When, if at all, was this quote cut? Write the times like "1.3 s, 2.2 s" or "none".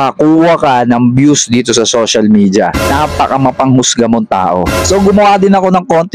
3.0 s, 4.7 s